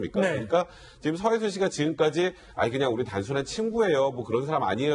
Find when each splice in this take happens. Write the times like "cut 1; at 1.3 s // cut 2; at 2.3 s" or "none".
none